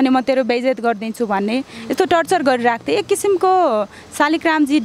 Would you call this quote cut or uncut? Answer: uncut